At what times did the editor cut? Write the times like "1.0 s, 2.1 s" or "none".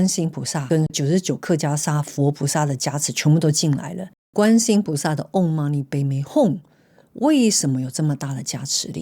0.9 s, 4.3 s